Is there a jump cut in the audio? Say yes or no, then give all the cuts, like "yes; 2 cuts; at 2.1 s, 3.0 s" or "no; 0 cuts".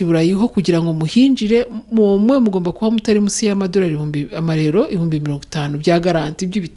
no; 0 cuts